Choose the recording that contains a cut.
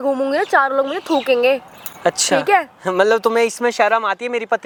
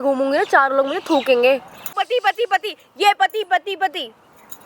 second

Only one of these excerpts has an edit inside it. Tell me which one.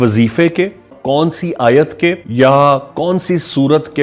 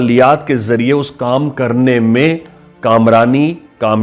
first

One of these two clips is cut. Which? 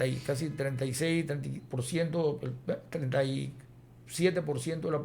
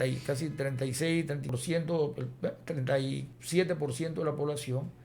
second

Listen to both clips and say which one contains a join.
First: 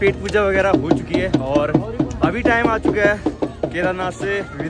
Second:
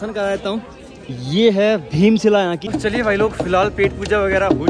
second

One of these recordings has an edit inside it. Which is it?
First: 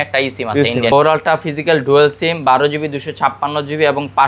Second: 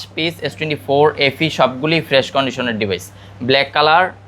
first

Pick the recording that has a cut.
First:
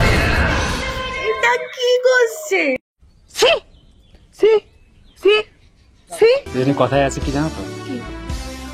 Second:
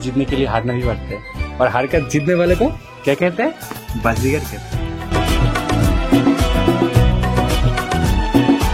first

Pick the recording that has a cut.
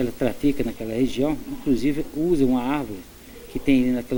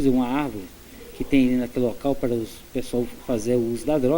second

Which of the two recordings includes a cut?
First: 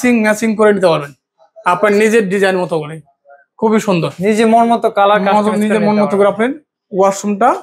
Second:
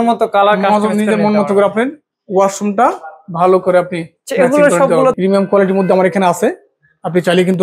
second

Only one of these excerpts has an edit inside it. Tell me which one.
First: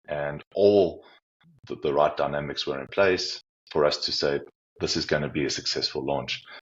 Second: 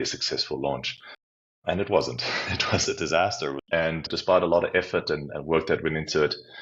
second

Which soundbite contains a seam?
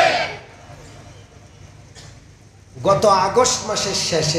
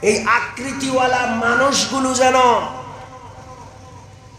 first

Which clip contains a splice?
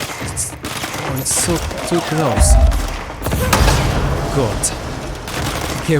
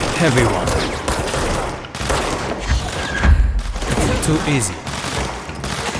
second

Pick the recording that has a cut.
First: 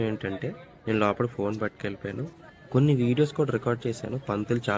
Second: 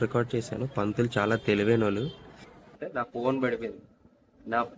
second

